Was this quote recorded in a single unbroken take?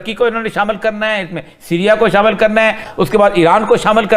no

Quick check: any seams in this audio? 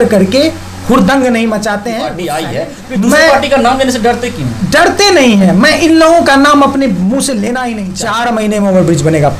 yes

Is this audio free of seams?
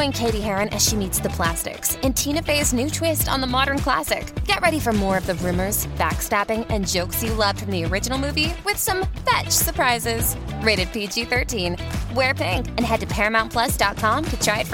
yes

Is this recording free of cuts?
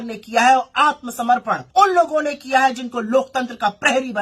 no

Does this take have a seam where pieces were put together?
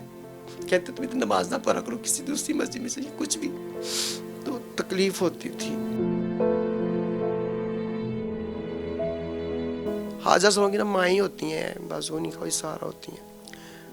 yes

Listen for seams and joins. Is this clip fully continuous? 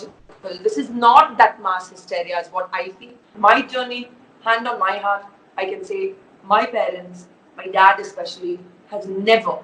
no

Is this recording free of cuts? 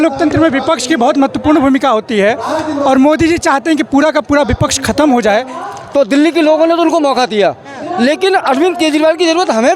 no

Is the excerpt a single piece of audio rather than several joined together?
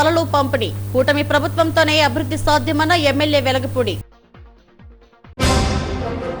yes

